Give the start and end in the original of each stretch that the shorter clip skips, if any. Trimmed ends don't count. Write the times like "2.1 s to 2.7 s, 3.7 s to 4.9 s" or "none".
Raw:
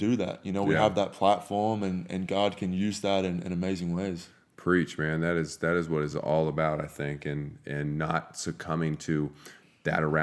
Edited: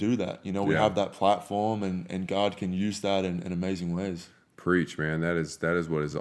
none